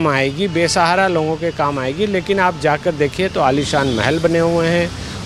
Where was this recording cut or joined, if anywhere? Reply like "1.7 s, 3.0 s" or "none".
none